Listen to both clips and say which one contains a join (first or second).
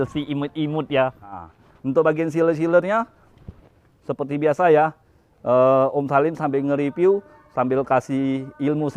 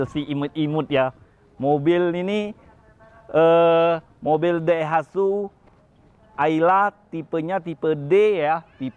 first